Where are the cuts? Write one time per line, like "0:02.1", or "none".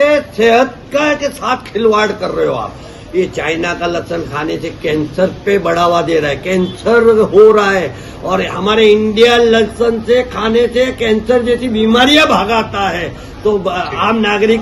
none